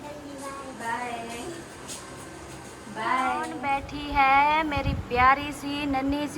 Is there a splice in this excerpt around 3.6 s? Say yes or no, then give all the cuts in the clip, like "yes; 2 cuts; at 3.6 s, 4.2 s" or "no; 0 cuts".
yes; 1 cut; at 3.6 s